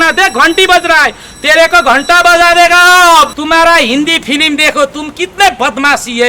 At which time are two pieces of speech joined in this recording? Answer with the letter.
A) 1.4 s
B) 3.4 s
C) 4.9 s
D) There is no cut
B